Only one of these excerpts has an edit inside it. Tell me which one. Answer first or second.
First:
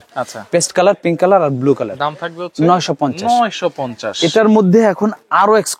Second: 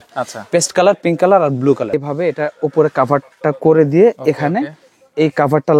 second